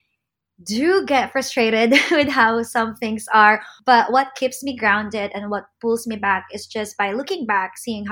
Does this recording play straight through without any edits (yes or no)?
no